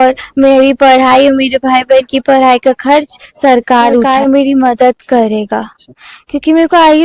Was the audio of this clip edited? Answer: yes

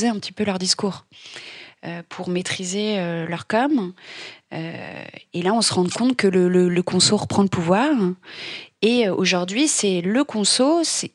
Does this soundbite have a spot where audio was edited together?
no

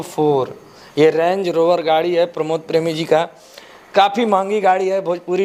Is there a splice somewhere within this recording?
no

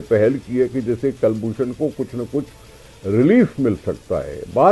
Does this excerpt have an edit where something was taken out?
no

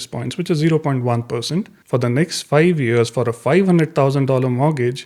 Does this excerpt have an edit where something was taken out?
yes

